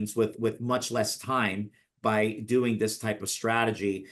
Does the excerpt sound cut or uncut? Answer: uncut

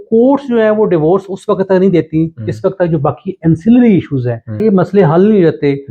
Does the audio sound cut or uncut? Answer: cut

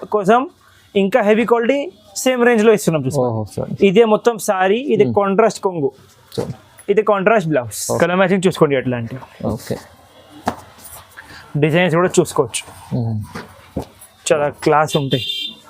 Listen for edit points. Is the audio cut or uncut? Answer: cut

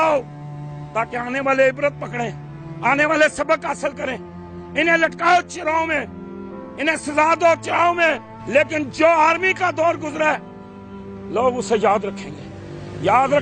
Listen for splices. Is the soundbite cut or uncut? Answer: cut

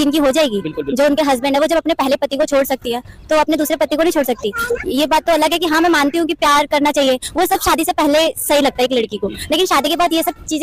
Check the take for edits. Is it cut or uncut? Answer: uncut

